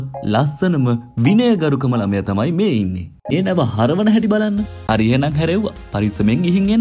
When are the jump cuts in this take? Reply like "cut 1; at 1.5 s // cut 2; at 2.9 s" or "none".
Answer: cut 1; at 3.3 s // cut 2; at 4.8 s